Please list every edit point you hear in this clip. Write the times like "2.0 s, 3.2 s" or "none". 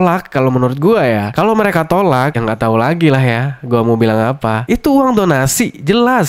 none